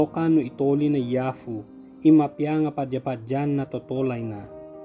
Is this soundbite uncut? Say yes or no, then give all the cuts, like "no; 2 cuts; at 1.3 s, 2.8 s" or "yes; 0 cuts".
yes; 0 cuts